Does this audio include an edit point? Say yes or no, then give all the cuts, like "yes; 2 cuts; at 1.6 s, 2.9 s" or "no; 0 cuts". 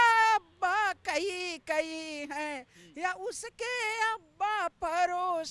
no; 0 cuts